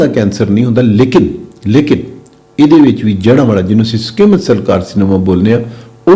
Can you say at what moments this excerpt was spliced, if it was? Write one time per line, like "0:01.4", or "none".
none

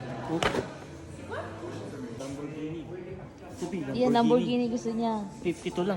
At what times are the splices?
0:02.2

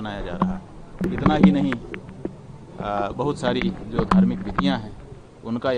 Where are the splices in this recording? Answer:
0:01.0

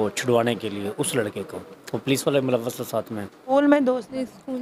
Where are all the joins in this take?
0:03.3

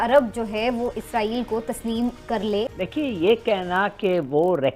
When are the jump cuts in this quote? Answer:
0:02.7

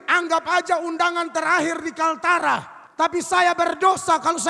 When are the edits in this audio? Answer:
0:02.8

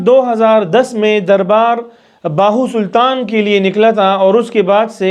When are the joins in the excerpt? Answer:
none

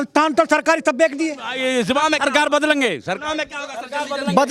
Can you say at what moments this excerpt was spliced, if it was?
0:01.5

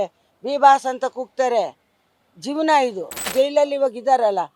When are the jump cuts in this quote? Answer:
0:03.3

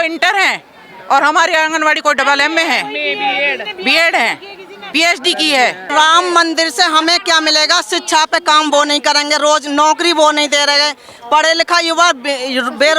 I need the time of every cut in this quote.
0:05.9

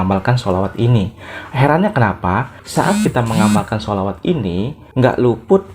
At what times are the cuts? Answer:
0:02.6

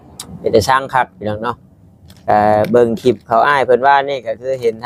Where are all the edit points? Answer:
none

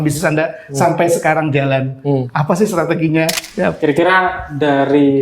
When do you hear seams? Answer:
0:03.4

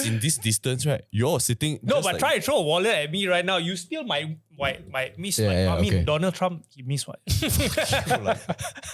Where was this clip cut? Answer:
none

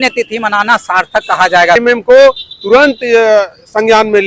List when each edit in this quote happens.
0:01.8

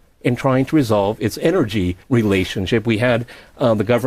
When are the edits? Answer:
0:02.6

